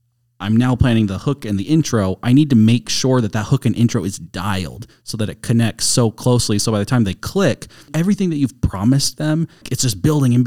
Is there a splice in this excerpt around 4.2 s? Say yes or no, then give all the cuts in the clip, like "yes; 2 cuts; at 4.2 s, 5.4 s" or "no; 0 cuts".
no; 2 cuts; at 7.9 s, 9.7 s